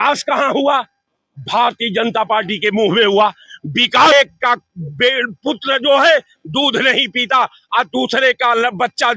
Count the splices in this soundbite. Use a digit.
1